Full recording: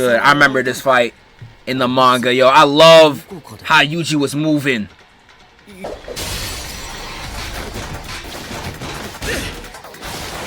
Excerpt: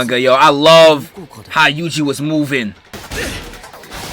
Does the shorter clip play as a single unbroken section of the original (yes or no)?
no